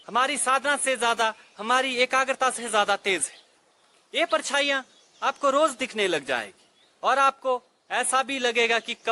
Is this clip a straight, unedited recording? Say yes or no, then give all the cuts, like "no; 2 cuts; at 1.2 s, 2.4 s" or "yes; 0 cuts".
yes; 0 cuts